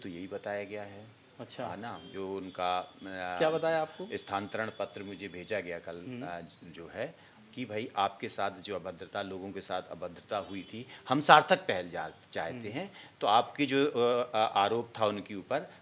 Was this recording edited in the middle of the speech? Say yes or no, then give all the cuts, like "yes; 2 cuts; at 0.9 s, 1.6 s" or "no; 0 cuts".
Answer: no; 0 cuts